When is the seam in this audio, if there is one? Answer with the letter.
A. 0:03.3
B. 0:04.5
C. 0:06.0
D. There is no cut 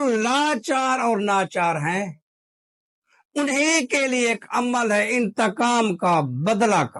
D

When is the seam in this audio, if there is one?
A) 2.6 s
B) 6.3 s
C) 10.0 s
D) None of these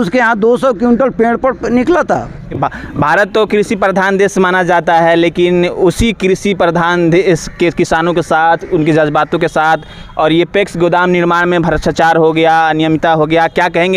A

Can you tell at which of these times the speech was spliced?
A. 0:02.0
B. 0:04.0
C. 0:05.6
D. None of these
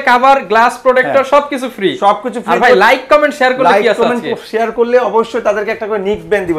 D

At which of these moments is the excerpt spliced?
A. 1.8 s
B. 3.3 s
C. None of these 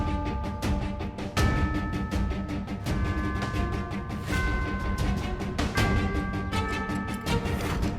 B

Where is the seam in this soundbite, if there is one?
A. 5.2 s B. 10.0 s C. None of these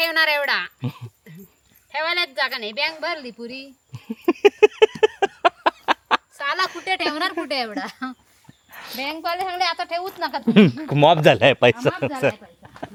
C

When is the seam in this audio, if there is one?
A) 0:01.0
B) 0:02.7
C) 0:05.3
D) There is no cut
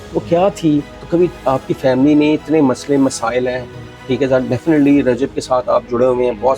A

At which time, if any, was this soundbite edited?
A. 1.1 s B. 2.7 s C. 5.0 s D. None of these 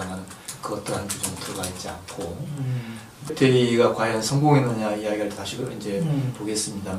B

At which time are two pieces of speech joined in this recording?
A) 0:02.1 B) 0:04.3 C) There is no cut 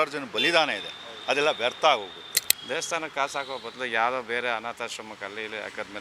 A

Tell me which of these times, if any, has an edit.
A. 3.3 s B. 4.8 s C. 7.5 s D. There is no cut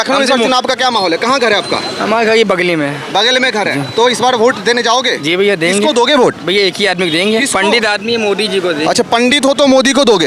D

